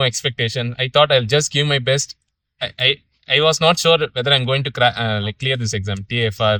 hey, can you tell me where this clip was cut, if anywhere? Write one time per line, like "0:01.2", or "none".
none